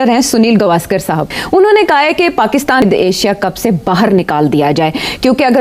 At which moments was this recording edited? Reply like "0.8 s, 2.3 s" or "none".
1.3 s, 2.8 s